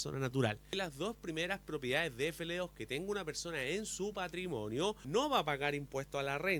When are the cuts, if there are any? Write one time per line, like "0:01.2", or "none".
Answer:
0:00.8
0:05.0